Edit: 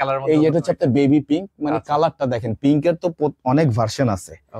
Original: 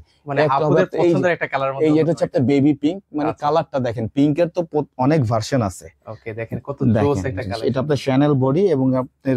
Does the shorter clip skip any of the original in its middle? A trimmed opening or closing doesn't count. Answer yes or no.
no